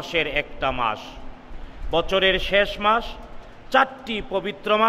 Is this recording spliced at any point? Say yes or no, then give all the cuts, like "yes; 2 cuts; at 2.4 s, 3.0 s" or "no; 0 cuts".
no; 0 cuts